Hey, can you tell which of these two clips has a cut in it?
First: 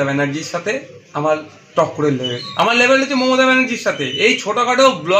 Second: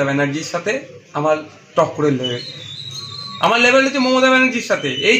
first; 1 cut; at 2.4 s

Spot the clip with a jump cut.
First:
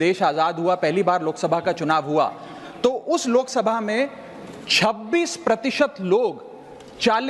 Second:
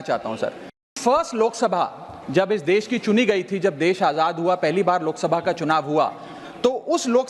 second; 1 cut; at 1.0 s

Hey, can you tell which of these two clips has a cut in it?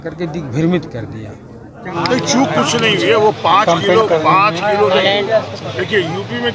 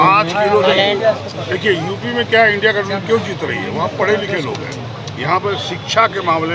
first; 1 cut; at 1.9 s

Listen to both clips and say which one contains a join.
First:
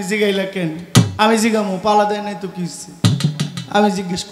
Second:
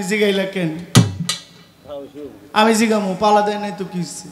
first; 1 cut; at 1.1 s

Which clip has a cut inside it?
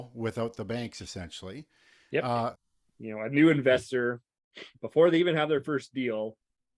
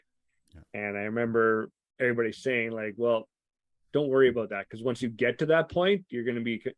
first; 1 cut; at 2.6 s

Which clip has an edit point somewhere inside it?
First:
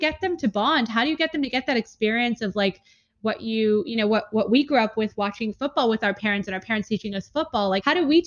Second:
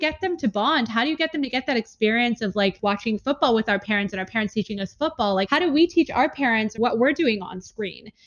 second; 2 cuts; at 2.8 s, 6.7 s

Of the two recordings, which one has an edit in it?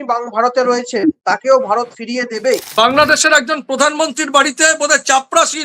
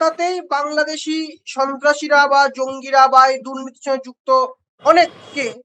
first; 2 cuts; at 1.2 s, 2.7 s

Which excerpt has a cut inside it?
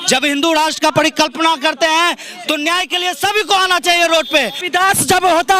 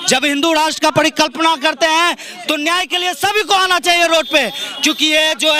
first; 1 cut; at 4.6 s

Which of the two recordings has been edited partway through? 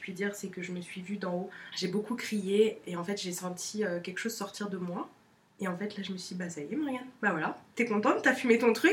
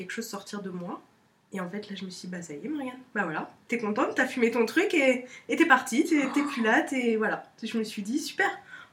first; 2 cuts; at 1.6 s, 2.8 s

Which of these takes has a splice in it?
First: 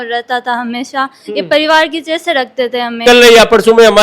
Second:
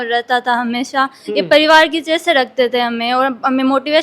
first; 1 cut; at 3.0 s

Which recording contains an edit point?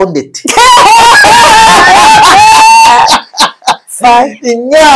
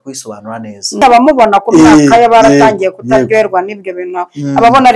second; 1 cut; at 1.0 s

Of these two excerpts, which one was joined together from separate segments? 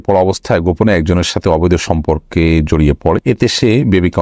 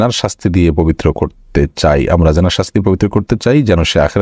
first; 1 cut; at 3.2 s

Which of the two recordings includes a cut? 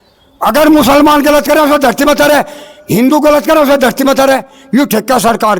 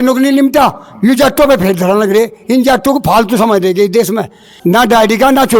second; 1 cut; at 4.4 s

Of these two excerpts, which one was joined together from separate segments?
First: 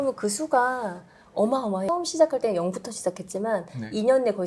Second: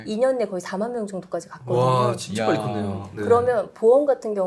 first; 1 cut; at 1.8 s

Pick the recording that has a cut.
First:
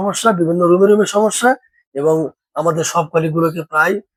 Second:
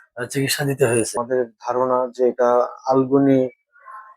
second; 1 cut; at 1.2 s

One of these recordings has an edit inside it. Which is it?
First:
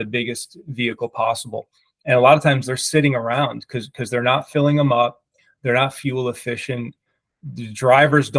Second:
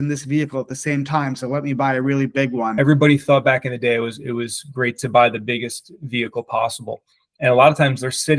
second; 1 cut; at 2.7 s

